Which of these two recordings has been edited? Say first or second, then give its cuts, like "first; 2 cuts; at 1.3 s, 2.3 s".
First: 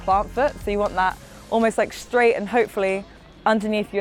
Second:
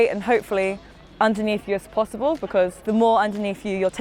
second; 1 cut; at 2.8 s